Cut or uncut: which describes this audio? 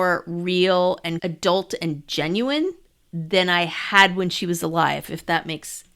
cut